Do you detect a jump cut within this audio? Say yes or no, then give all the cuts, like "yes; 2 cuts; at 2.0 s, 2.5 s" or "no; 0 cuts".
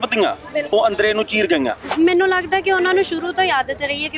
yes; 1 cut; at 1.9 s